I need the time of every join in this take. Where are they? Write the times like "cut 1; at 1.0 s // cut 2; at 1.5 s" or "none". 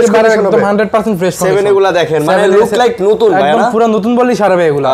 none